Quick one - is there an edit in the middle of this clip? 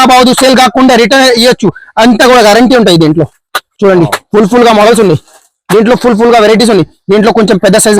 no; 0 cuts

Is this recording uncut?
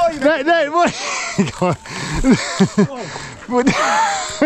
yes; 0 cuts

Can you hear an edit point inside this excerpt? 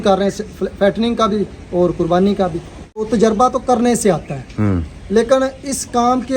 yes; 1 cut; at 3.1 s

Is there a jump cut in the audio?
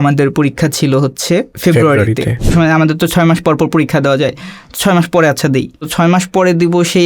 yes; 3 cuts; at 1.5 s, 2.5 s, 5.9 s

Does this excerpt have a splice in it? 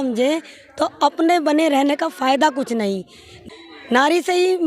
yes; 1 cut; at 3.4 s

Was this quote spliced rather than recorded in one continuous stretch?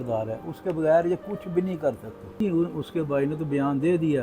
yes; 1 cut; at 2.4 s

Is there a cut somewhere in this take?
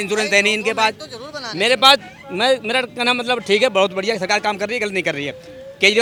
no; 0 cuts

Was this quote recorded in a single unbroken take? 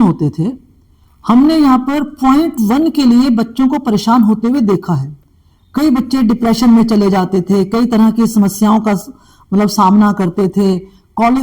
yes; 0 cuts

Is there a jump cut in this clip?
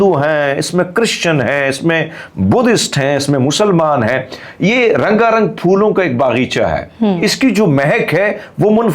no; 0 cuts

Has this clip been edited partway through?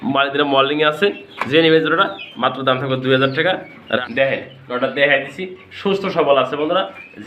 yes; 1 cut; at 4.1 s

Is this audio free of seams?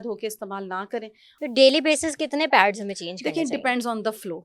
no; 1 cut; at 1.2 s

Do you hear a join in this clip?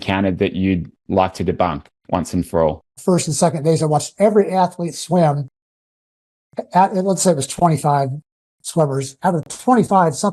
yes; 1 cut; at 2.9 s

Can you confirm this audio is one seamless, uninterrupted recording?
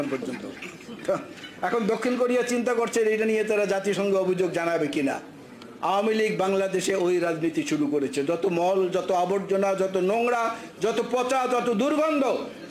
yes; 0 cuts

